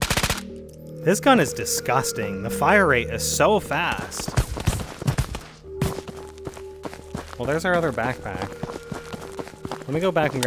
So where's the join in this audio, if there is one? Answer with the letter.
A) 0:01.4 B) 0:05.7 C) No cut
C